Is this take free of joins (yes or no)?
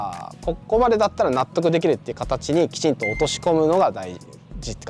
yes